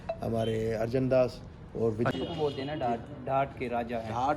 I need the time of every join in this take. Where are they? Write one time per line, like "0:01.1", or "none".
0:02.1

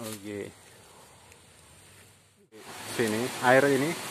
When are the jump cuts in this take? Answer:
0:02.6

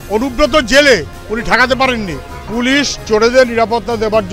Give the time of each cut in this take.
0:02.3

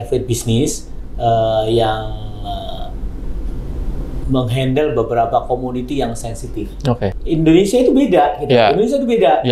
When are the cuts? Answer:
0:07.1

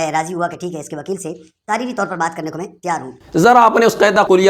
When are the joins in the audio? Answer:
0:03.2

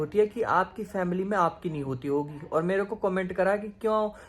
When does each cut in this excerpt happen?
none

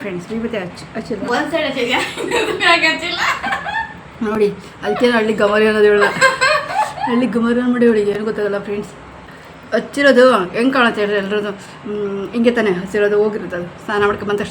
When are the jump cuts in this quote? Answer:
none

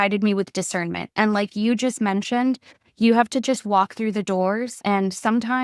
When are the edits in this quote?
0:04.7

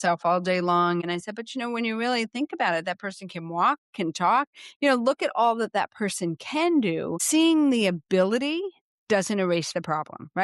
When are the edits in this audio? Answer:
0:01.0
0:07.2

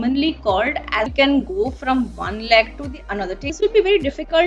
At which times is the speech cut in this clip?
0:01.1
0:03.5

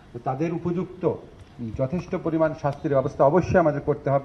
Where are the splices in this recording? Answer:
none

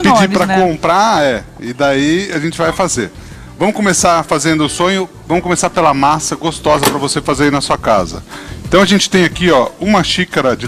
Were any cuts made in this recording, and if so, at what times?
0:07.8

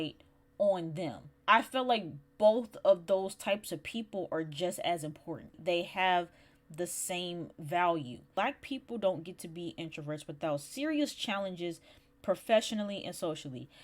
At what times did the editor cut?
0:01.3
0:05.6
0:08.3

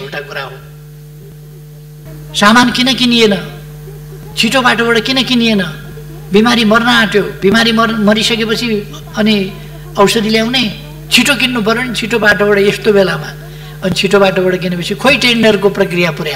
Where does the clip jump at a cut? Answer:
0:02.1

